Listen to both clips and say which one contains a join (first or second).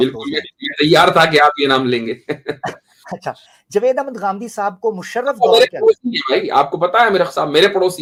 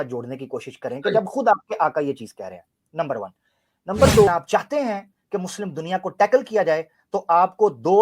second